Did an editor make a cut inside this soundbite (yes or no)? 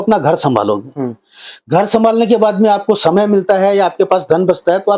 no